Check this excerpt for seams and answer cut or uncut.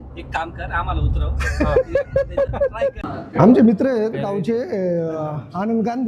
cut